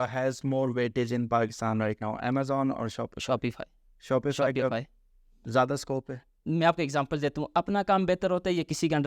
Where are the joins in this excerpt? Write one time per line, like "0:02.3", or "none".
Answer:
none